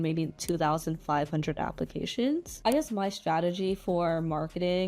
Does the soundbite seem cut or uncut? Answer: cut